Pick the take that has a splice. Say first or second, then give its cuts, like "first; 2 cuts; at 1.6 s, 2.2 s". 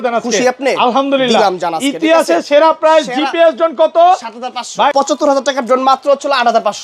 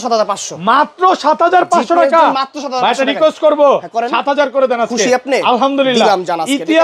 first; 1 cut; at 4.9 s